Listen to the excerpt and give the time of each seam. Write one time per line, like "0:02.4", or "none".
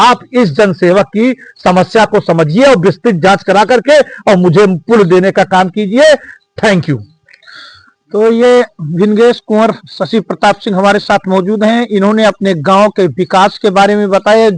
none